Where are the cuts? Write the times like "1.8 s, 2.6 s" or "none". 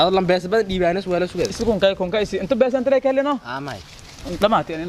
none